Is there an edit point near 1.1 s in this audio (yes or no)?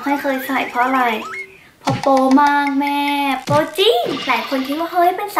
no